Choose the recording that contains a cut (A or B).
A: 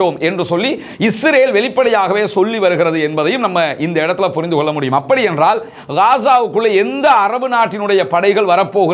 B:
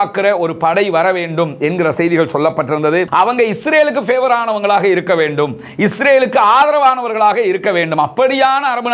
B